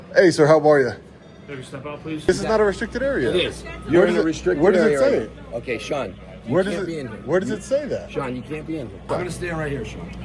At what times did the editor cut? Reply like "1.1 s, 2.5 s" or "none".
2.3 s, 9.0 s